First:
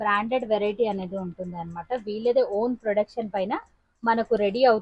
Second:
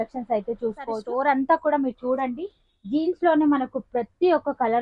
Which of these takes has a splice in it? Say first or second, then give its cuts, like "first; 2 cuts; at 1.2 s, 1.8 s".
second; 1 cut; at 1.0 s